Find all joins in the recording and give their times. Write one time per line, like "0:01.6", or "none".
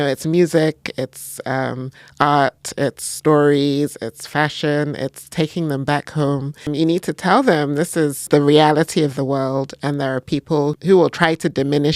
0:06.7
0:08.3
0:10.8

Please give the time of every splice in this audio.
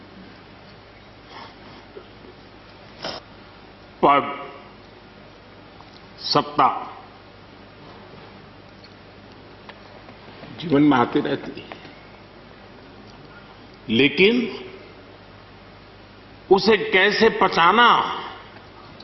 0:03.2

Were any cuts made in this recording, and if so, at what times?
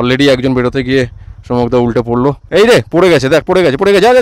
0:02.5

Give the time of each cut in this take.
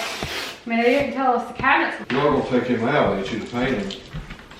0:02.0

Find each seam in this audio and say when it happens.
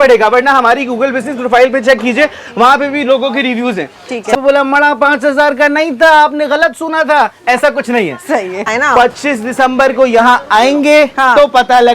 0:04.4
0:08.7

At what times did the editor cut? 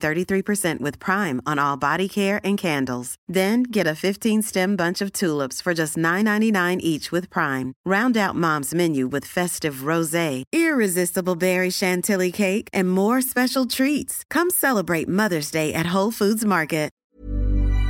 0:16.9

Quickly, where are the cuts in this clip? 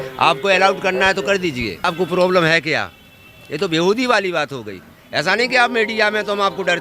0:01.8

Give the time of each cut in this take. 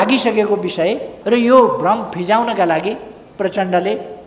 0:01.1

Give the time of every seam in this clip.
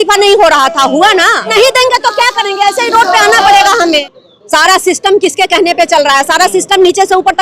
0:01.5
0:04.1

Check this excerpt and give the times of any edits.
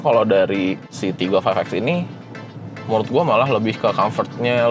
0:00.9

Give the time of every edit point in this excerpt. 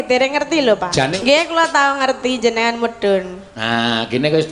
0:01.1

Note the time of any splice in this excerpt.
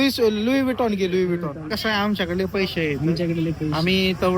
0:01.7

